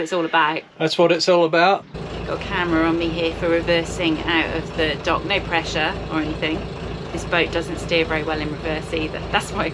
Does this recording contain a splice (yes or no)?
yes